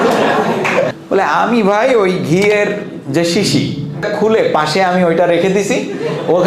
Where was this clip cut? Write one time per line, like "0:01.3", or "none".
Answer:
0:00.9
0:04.1